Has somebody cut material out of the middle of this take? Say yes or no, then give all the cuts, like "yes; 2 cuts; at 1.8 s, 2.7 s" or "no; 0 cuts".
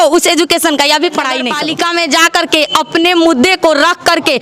yes; 1 cut; at 1.5 s